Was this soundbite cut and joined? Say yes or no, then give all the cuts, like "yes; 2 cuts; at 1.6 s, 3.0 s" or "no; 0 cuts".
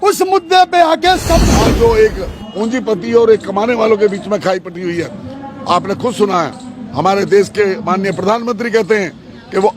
yes; 1 cut; at 1.4 s